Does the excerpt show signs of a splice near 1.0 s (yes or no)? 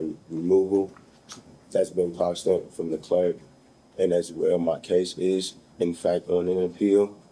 no